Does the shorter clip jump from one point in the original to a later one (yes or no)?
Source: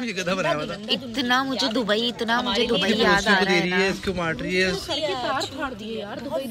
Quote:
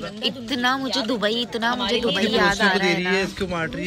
no